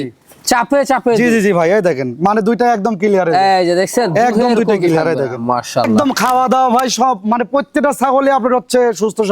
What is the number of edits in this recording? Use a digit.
1